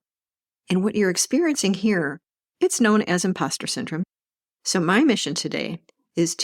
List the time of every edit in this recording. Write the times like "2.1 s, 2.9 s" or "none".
4.0 s